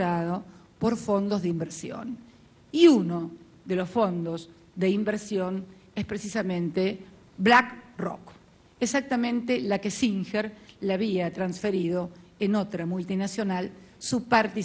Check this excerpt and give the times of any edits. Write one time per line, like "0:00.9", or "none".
none